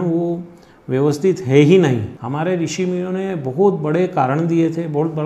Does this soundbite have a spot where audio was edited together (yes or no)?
yes